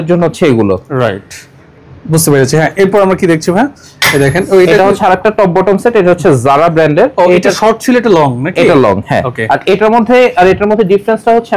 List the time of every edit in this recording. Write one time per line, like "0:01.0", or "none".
none

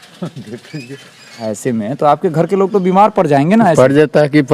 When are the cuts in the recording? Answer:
0:01.4

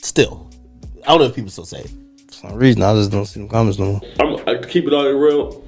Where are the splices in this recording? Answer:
0:02.5
0:04.1

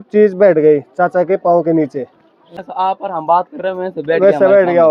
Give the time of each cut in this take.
0:02.4

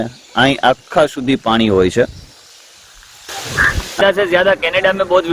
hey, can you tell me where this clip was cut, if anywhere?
0:04.0

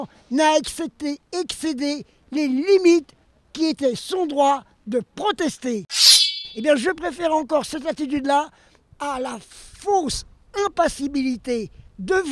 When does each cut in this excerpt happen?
0:06.3

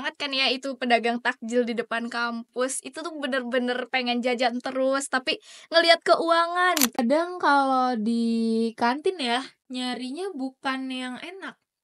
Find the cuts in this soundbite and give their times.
0:07.0

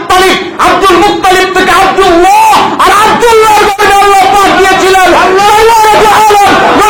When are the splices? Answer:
none

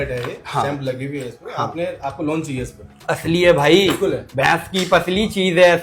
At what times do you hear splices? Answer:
none

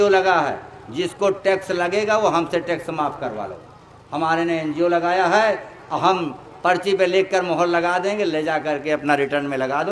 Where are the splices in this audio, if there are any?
none

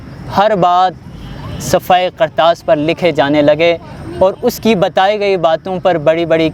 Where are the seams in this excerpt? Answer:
none

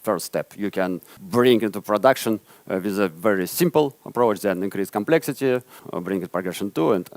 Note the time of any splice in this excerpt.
0:01.1
0:05.8

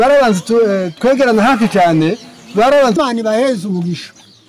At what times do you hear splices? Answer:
0:03.0

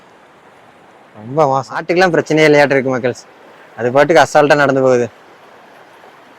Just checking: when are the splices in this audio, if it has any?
0:01.8

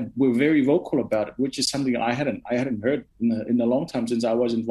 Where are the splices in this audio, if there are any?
none

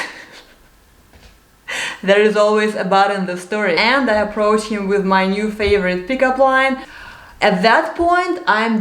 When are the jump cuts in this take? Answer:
0:03.8
0:06.9

